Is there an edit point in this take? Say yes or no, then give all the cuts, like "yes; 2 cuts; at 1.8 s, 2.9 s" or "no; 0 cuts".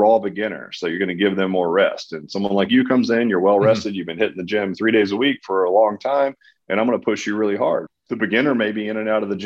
yes; 1 cut; at 7.9 s